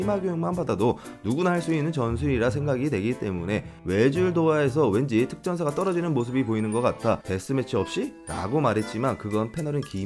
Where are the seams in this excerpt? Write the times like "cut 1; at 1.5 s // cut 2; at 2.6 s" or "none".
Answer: cut 1; at 3.8 s // cut 2; at 7.2 s

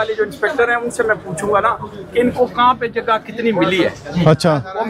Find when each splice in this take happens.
none

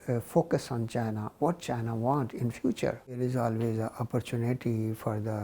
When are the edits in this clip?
cut 1; at 3.1 s

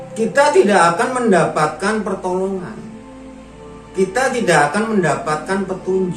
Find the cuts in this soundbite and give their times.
none

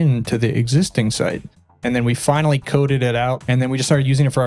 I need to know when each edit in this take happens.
cut 1; at 1.7 s // cut 2; at 3.4 s

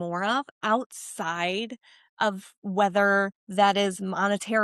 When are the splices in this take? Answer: cut 1; at 3.4 s

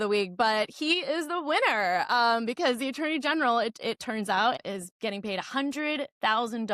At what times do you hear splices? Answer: cut 1; at 4.6 s

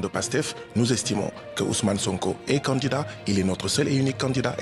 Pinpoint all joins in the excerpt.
none

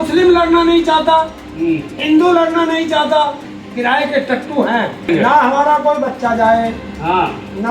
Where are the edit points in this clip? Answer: cut 1; at 3.5 s // cut 2; at 5.1 s

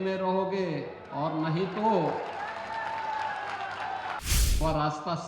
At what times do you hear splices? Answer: cut 1; at 4.2 s

